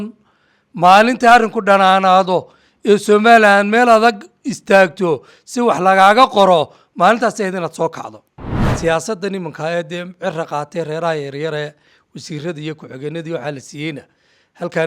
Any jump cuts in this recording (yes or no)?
yes